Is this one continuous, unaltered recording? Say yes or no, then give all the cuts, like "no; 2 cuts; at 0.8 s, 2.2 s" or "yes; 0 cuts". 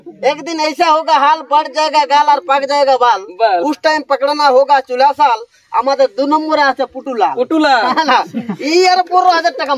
yes; 0 cuts